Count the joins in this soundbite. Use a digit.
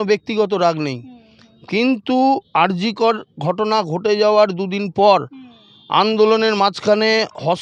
0